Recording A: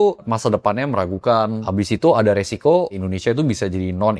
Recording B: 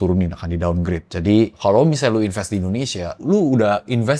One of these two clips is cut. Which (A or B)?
A